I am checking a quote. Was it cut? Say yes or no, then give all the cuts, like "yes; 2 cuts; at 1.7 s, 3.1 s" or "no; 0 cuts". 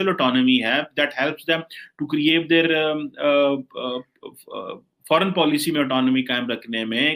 no; 0 cuts